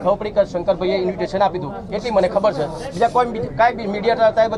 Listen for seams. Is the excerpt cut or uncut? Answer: uncut